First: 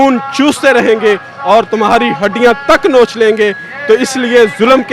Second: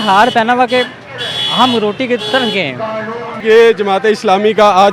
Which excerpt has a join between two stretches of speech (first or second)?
second